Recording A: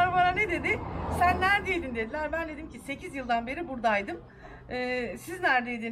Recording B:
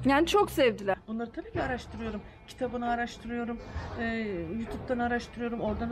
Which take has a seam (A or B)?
B